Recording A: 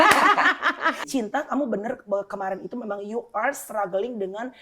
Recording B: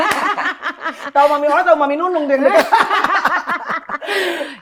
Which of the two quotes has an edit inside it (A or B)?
A